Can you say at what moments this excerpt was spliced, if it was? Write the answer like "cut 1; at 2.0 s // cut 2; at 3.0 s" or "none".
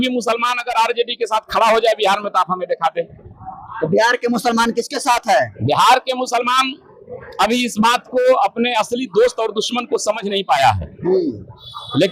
none